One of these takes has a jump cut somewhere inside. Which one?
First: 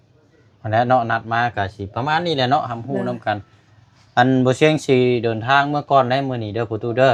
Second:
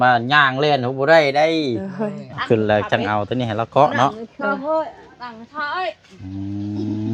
second; 1 cut; at 2.3 s

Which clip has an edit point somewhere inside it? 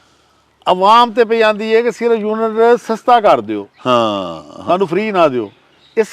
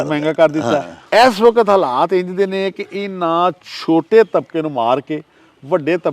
second; 1 cut; at 1.0 s

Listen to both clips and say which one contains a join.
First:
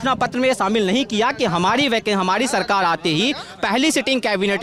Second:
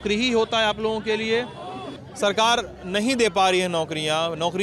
second; 1 cut; at 1.9 s

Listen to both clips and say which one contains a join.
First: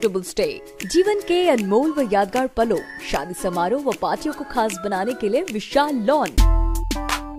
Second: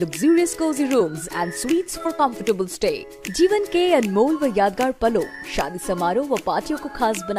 first; 1 cut; at 6.4 s

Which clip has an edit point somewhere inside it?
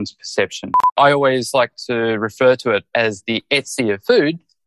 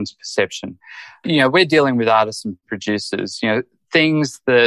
first; 1 cut; at 0.9 s

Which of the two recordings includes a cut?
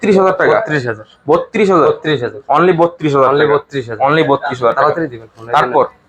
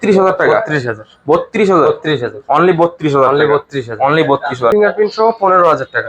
second; 1 cut; at 4.7 s

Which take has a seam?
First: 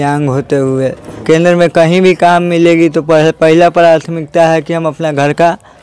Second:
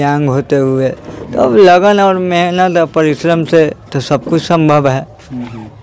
first; 1 cut; at 1.1 s

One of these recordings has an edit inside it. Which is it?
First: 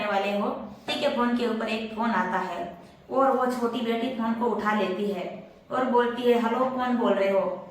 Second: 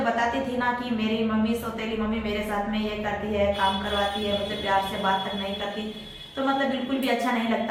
first; 1 cut; at 0.9 s

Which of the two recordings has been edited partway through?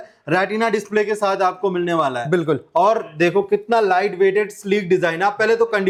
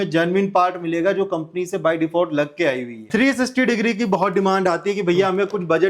second; 1 cut; at 3.0 s

